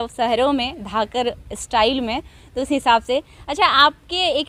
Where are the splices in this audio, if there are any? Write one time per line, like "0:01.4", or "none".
none